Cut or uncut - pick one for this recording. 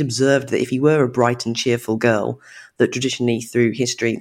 uncut